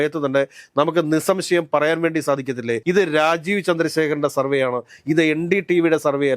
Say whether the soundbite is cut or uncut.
cut